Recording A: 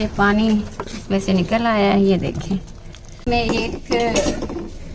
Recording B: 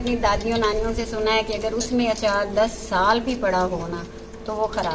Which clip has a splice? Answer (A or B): A